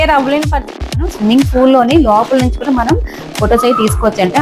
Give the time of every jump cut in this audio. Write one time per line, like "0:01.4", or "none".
0:01.0